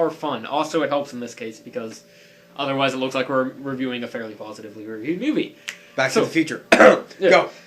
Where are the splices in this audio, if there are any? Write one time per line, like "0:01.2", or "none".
none